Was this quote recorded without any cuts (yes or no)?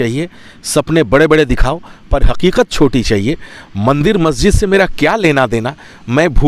yes